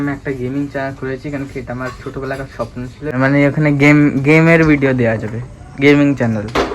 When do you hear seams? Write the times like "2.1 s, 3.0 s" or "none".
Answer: 3.2 s